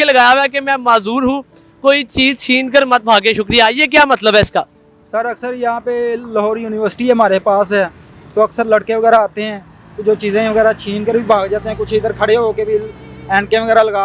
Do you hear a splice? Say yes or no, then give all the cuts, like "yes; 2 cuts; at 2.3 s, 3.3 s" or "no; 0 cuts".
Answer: no; 0 cuts